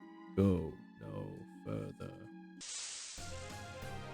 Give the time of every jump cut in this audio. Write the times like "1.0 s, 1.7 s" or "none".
none

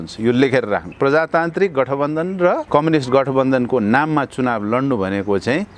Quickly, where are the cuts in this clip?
0.9 s, 2.6 s

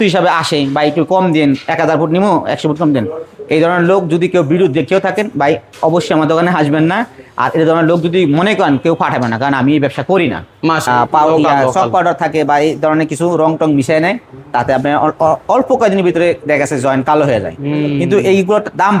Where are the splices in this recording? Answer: 10.8 s

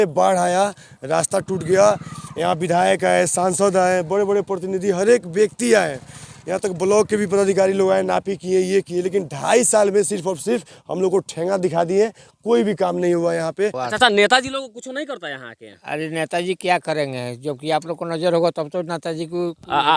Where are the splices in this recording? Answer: 13.8 s

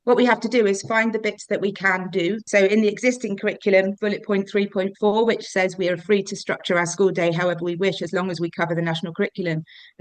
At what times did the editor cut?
2.5 s, 4.0 s

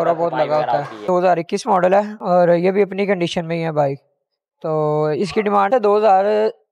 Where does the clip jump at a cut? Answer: 1.1 s, 5.7 s

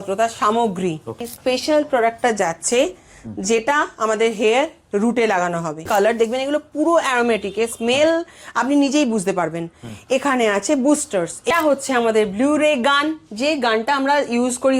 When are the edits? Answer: 1.3 s, 5.8 s, 11.5 s

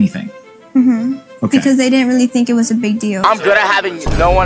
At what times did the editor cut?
none

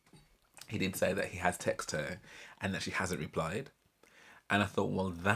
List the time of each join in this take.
none

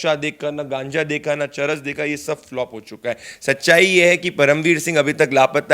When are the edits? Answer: 3.3 s

